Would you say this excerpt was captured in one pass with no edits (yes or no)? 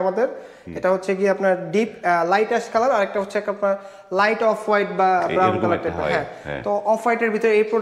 yes